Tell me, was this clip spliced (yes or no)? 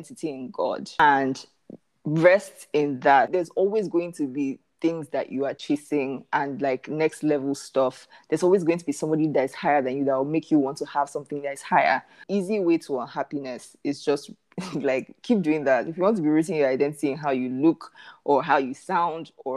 yes